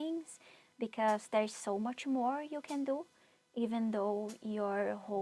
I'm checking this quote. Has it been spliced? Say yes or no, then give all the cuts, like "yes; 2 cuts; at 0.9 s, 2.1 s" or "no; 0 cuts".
no; 0 cuts